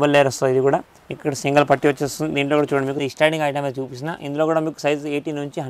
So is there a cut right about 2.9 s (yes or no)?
yes